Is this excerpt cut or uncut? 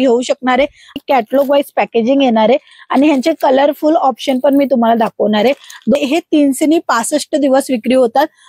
cut